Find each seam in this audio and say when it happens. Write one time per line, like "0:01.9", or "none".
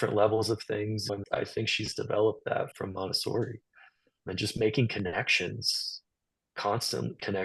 0:01.2
0:02.7
0:04.2